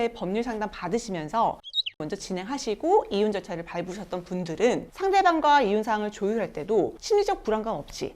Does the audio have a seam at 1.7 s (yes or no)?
yes